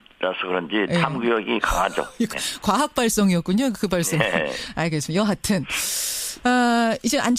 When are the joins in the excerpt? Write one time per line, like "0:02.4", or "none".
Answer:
0:05.8